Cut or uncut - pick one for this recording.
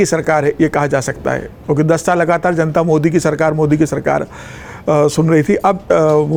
uncut